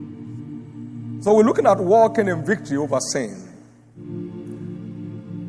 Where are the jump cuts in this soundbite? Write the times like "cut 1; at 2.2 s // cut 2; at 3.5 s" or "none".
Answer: cut 1; at 1.2 s